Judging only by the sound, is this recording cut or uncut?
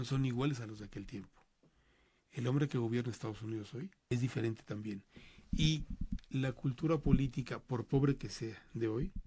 cut